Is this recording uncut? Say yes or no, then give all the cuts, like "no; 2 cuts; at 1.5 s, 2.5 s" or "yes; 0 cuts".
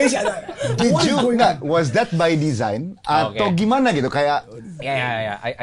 yes; 0 cuts